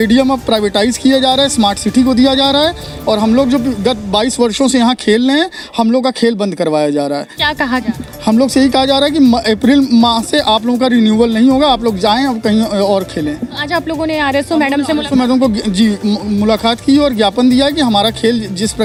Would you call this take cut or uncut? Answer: uncut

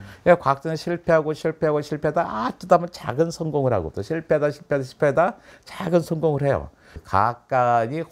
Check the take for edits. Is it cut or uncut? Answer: cut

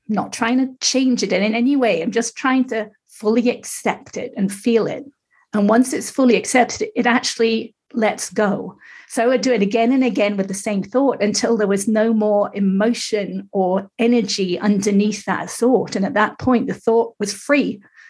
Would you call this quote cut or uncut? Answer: uncut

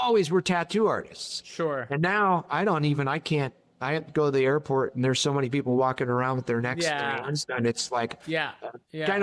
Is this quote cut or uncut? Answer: cut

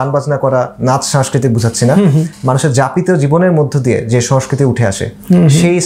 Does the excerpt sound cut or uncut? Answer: uncut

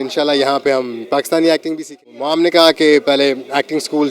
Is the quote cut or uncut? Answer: cut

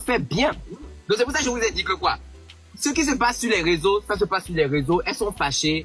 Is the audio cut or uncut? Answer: uncut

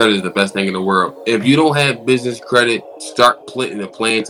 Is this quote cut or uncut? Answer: cut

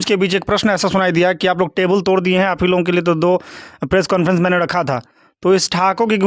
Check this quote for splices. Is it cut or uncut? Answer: cut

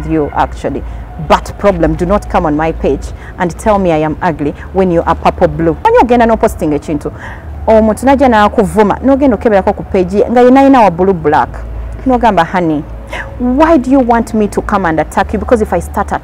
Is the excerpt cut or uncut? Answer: cut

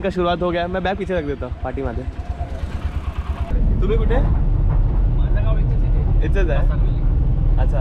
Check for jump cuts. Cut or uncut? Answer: uncut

